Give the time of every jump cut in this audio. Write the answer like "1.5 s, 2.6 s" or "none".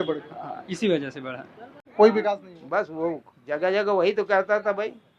1.9 s